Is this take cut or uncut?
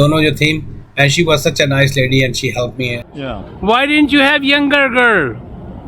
cut